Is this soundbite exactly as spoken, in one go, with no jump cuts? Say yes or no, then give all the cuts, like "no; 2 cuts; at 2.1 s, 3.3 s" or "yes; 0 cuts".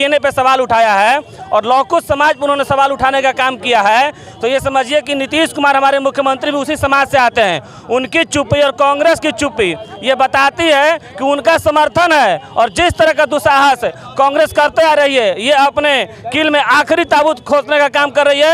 yes; 0 cuts